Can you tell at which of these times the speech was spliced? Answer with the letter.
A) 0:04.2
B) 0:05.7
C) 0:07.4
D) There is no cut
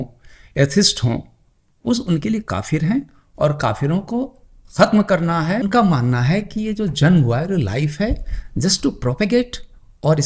B